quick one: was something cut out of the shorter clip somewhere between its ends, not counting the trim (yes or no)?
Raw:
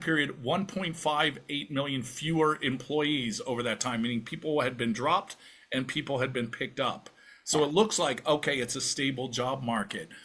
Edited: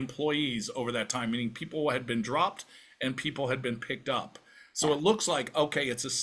no